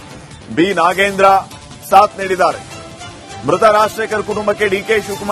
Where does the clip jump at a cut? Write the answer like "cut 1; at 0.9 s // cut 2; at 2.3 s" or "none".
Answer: none